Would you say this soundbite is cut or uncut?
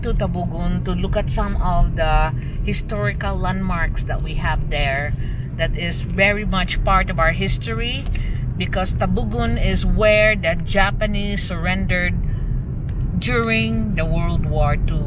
uncut